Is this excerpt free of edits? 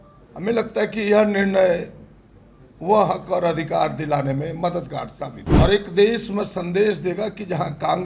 no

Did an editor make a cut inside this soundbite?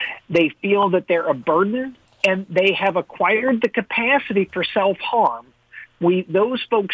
yes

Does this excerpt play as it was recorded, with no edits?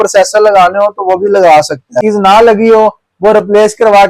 no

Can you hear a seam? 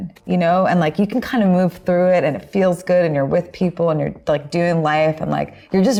no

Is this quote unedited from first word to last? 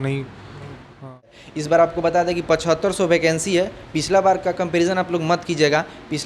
no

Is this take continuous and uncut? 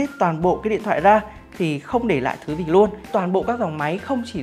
no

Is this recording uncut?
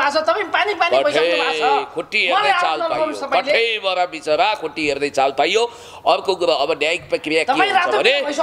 yes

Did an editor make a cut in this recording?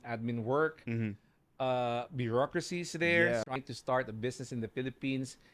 yes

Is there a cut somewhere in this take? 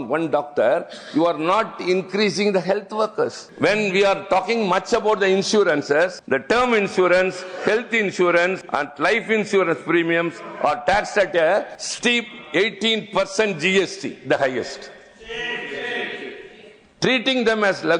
yes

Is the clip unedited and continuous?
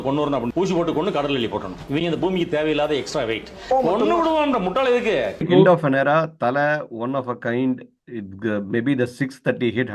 no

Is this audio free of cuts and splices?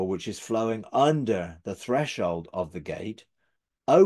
yes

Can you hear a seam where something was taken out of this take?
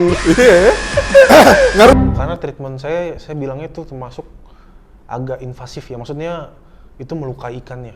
yes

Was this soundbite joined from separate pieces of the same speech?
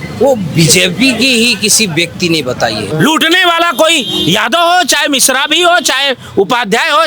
yes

